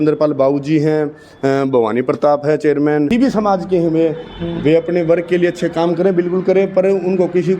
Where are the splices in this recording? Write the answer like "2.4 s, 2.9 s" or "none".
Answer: 3.1 s